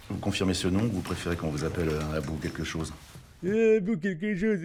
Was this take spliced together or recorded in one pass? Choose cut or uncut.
uncut